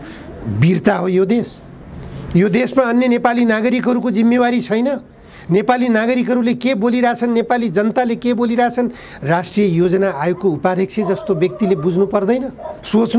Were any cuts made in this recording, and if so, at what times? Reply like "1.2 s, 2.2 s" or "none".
none